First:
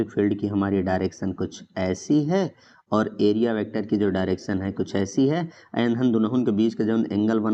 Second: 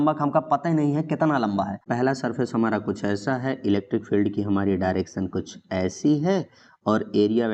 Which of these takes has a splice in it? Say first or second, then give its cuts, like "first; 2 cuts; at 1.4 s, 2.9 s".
second; 1 cut; at 1.8 s